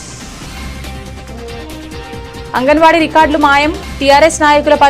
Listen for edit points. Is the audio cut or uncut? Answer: uncut